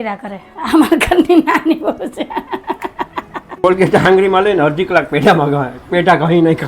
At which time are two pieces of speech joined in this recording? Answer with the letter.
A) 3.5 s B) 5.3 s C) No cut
A